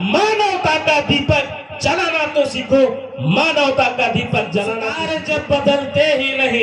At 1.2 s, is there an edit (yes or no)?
no